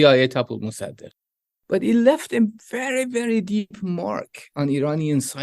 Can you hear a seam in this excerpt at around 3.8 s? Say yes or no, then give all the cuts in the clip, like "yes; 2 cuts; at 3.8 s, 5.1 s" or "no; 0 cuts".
no; 1 cut; at 1.3 s